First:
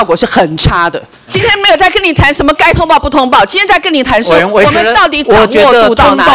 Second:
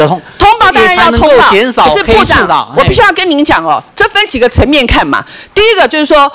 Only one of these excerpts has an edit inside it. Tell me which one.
first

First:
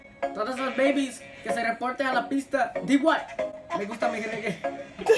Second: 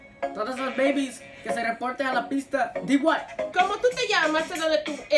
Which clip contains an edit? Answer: second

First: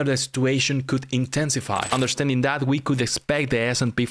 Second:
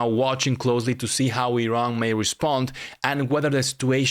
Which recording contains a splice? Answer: first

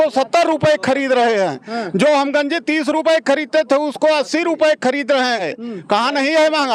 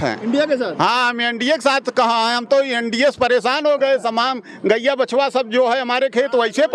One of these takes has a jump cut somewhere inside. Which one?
first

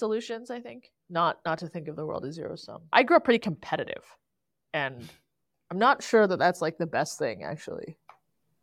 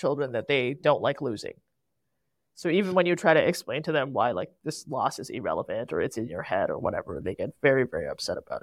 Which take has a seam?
first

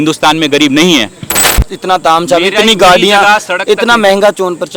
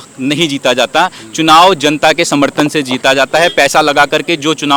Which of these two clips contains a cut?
first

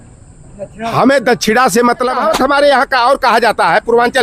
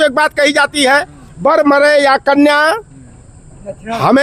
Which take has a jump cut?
first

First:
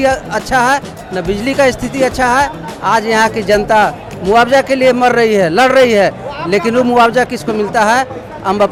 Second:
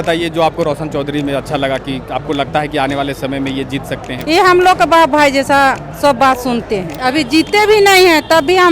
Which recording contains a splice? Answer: second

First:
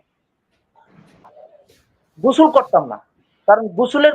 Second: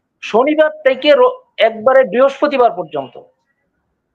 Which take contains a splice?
first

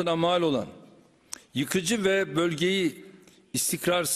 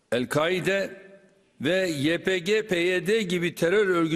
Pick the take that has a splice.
second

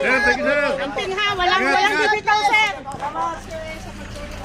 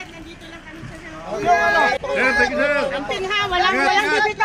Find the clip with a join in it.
first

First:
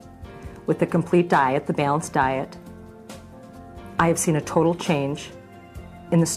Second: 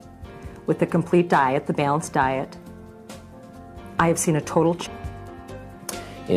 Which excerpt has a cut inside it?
first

